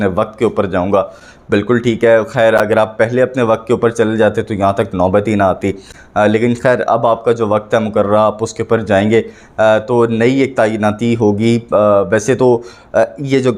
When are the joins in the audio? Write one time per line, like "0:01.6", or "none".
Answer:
none